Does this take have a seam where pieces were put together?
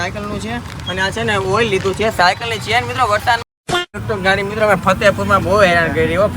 yes; 1 cut; at 3.9 s

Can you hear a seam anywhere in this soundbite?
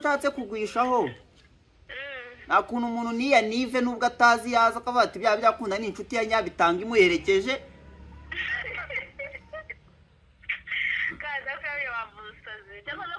no; 0 cuts

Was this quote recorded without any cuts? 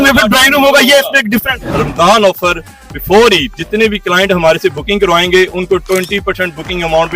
no; 2 cuts; at 1.8 s, 3.6 s

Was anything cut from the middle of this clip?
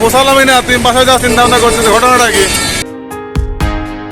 yes; 1 cut; at 2.8 s

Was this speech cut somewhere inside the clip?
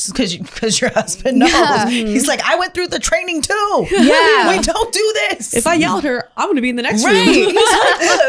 no; 0 cuts

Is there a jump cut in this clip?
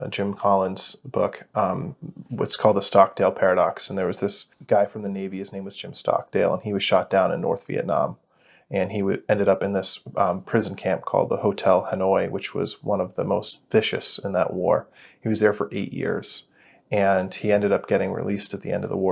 no; 0 cuts

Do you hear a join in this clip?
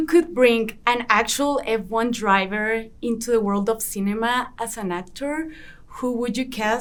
no; 0 cuts

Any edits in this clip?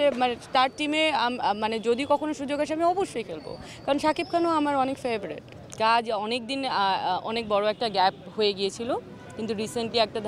no; 0 cuts

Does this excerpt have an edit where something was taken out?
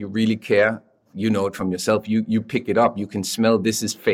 no; 0 cuts

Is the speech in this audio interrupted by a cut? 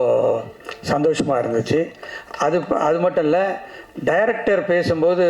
no; 0 cuts

